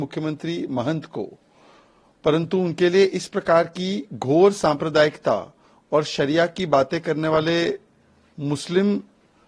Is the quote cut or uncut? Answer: uncut